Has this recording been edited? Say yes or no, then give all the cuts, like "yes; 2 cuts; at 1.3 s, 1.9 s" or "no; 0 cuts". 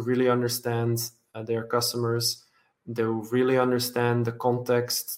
no; 0 cuts